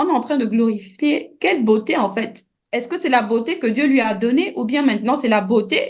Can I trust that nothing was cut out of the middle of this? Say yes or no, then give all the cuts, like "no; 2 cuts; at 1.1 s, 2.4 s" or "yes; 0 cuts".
yes; 0 cuts